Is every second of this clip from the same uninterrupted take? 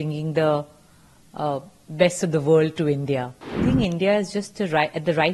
no; 1 cut; at 3.6 s

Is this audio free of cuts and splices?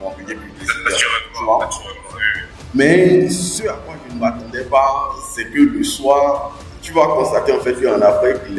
yes; 0 cuts

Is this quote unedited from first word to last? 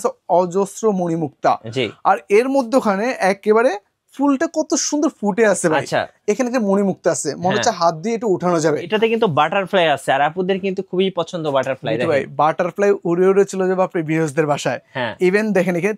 no; 1 cut; at 8.9 s

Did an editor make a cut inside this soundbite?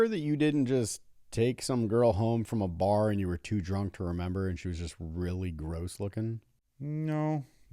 no; 0 cuts

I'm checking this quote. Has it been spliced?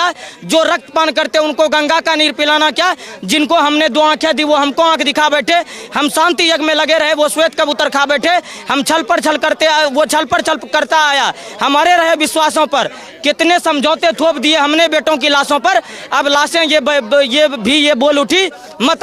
no; 0 cuts

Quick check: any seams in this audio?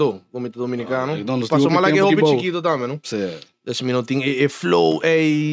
no; 0 cuts

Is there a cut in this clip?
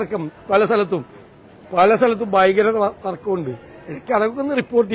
no; 0 cuts

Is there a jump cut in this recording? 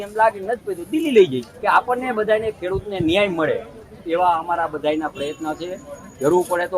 yes; 1 cut; at 1.5 s

